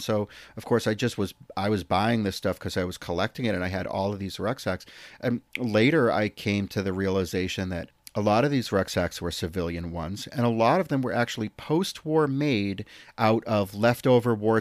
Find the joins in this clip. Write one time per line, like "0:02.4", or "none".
0:07.9